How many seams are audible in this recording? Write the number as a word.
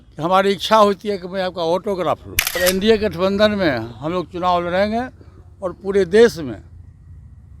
one